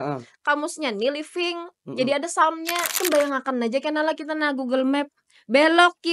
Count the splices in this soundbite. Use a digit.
1